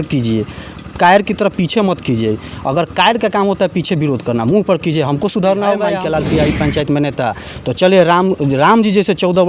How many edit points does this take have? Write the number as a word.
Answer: one